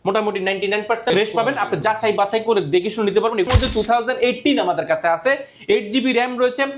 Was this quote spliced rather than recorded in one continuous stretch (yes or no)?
yes